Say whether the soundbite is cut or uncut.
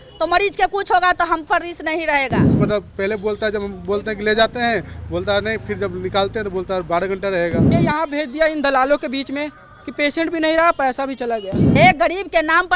cut